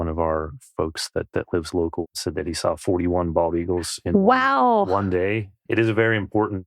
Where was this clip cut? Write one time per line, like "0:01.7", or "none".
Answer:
0:02.1
0:05.7